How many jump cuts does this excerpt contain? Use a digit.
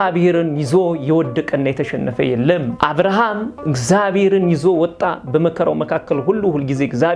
1